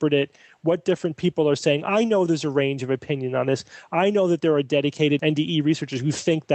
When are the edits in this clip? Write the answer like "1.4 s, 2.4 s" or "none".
5.2 s